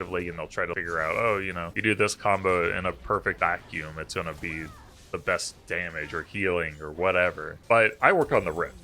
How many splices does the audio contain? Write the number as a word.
four